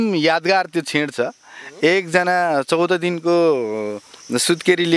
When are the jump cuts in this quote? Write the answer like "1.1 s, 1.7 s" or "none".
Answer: none